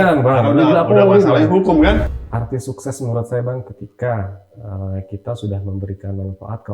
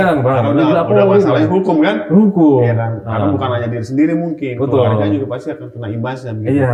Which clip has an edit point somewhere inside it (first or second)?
first